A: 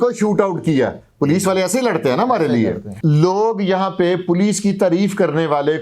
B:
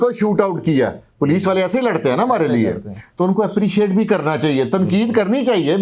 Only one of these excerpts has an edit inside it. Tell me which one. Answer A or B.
A